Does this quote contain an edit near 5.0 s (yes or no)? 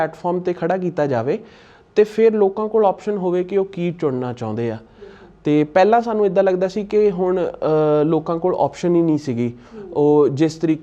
no